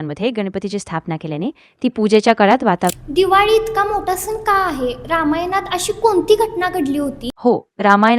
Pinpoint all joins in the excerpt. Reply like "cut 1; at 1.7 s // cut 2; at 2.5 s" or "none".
cut 1; at 2.9 s // cut 2; at 7.2 s